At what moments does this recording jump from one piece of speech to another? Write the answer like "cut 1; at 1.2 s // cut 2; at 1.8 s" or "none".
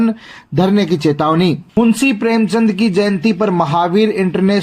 cut 1; at 1.7 s